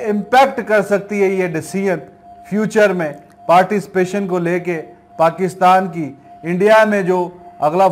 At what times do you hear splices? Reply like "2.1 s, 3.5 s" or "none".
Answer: none